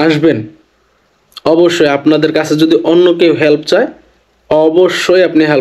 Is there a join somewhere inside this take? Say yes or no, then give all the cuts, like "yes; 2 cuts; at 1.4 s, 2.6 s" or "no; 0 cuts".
no; 0 cuts